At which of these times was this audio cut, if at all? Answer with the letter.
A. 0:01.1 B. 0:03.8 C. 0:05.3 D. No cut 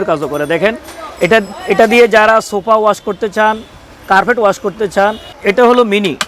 C